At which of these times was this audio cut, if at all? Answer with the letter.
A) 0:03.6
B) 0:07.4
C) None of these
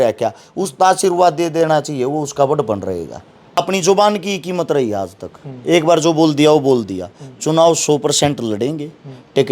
A